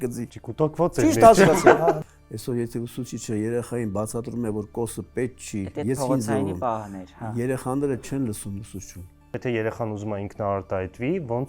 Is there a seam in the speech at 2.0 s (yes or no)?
yes